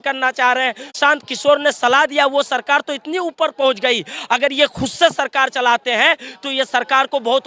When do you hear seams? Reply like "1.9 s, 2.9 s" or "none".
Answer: 0.9 s